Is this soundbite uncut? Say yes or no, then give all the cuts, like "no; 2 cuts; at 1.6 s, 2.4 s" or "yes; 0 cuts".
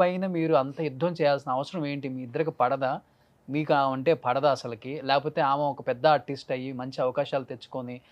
yes; 0 cuts